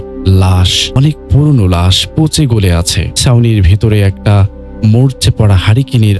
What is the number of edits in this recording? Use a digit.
2